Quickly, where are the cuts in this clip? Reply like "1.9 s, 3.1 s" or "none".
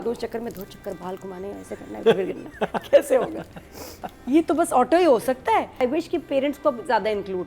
5.7 s